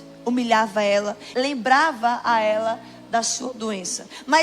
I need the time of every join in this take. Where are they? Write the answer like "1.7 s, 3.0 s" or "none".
1.2 s